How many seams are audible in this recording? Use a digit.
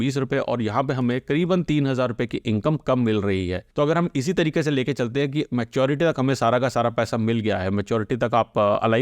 1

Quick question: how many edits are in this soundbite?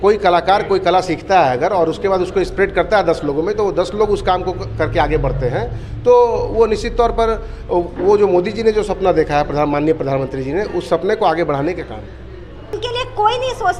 1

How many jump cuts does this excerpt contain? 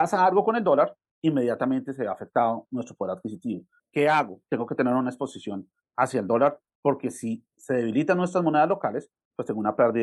1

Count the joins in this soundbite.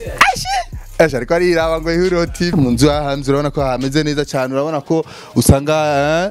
1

